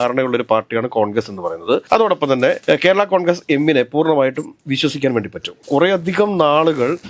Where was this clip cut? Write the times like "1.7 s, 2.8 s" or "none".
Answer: none